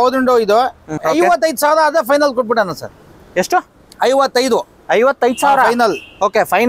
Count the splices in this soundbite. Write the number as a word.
one